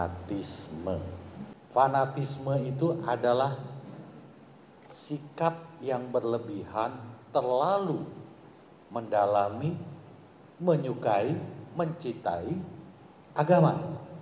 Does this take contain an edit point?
yes; 1 cut; at 1.5 s

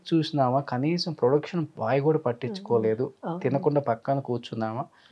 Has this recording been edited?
no; 0 cuts

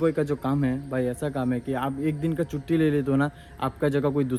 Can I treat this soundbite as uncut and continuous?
yes; 0 cuts

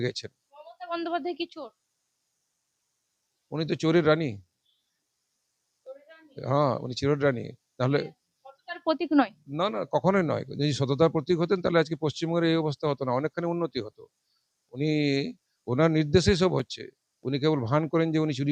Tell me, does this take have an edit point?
no; 0 cuts

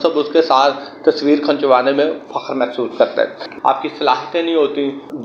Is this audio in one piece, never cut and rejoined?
no; 1 cut; at 3.4 s

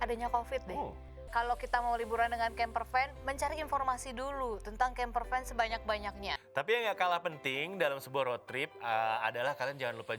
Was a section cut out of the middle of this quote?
yes; 2 cuts; at 1.3 s, 6.4 s

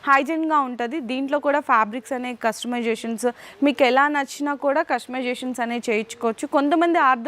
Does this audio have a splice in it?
no; 0 cuts

